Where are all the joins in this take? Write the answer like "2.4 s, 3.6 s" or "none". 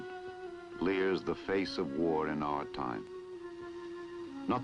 1.4 s